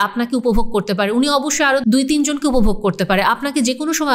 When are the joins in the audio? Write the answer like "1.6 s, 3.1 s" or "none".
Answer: 1.8 s